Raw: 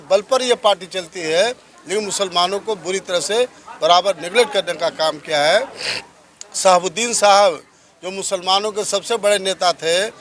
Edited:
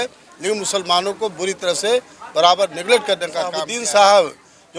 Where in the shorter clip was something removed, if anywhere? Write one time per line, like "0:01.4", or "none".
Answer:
0:03.7